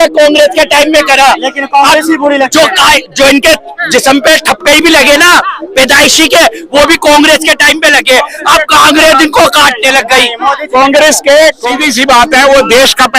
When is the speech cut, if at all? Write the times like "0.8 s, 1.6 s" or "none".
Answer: 11.7 s

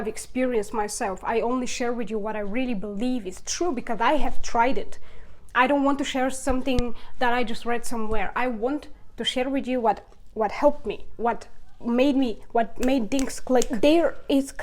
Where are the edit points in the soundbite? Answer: 13.7 s

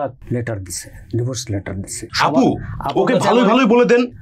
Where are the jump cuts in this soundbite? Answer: 2.1 s

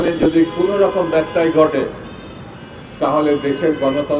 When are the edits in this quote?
none

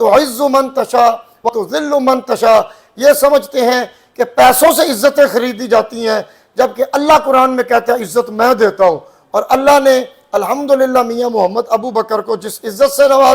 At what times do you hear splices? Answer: 1.5 s

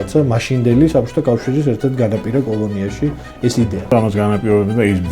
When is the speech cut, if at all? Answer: 3.9 s

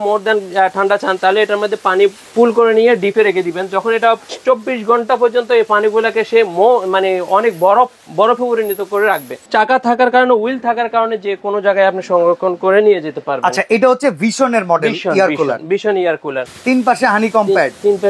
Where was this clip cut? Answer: 2.2 s, 4.3 s, 9.4 s, 16.5 s

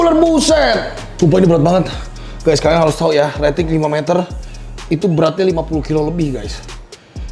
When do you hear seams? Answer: 1.0 s

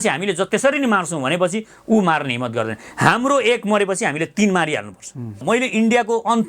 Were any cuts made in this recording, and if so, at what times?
5.4 s

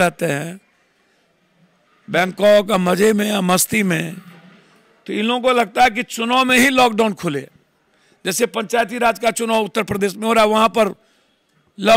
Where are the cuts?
none

